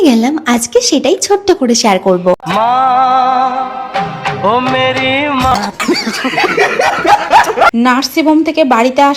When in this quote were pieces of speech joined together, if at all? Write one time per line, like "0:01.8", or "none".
0:07.7

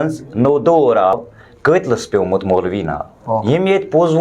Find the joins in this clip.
0:01.1
0:03.4

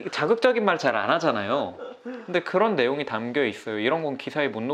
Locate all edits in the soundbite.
none

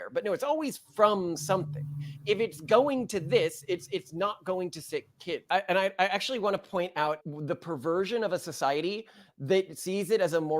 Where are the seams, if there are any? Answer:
0:05.4
0:07.2

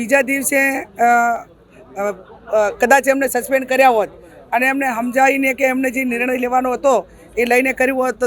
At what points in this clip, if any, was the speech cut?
none

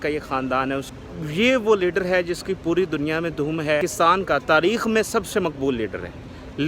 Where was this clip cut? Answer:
0:00.9
0:03.8

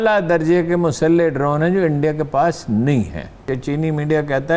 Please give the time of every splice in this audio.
0:03.5

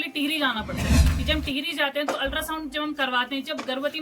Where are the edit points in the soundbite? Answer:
0:01.0

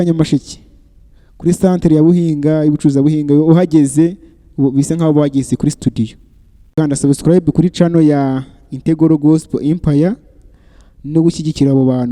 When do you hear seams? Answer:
0:06.7

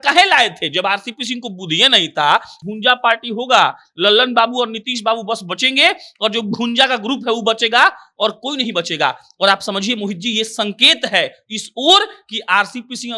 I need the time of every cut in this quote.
0:02.5

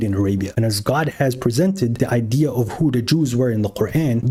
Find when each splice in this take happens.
none

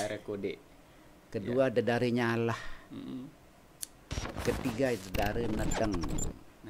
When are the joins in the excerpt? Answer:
none

